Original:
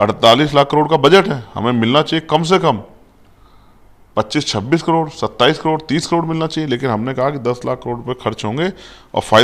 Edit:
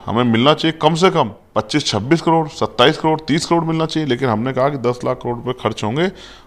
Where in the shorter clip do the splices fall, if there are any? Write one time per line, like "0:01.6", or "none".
0:01.4